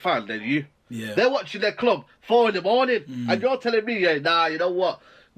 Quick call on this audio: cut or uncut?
uncut